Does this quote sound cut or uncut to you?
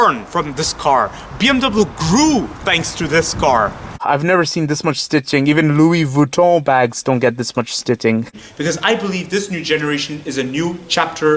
cut